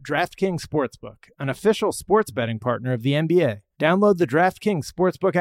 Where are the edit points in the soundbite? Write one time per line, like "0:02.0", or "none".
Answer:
0:03.6